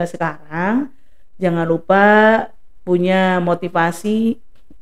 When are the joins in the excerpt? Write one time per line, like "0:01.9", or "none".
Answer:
none